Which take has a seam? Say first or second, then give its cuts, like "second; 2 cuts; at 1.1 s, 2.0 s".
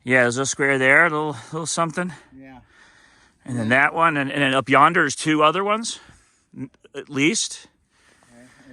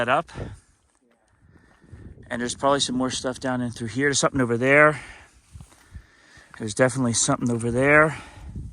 second; 1 cut; at 4.9 s